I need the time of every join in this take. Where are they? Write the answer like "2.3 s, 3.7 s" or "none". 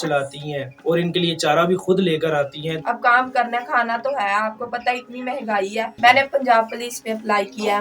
2.8 s, 5.9 s